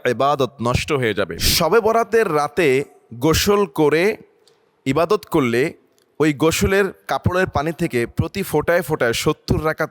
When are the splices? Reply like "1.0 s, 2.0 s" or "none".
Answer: 1.4 s

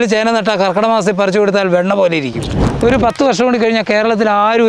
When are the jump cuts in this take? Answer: 2.6 s

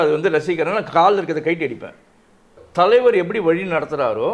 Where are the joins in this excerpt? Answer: 2.6 s

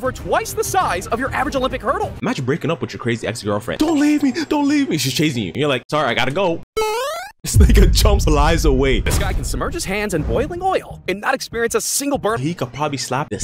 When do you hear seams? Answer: 2.1 s, 9.1 s, 12.4 s

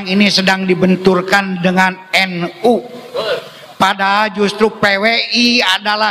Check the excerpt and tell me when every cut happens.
none

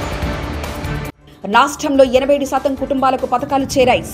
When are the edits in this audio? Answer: 1.1 s

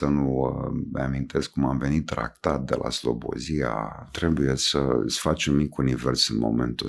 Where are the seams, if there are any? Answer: 4.1 s

